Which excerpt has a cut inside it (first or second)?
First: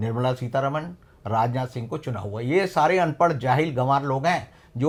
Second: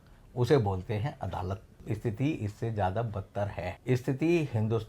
second